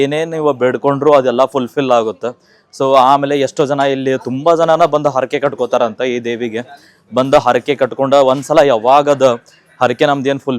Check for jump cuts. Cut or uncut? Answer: uncut